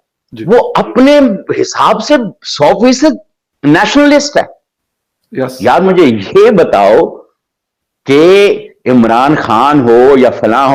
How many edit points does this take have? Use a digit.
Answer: 0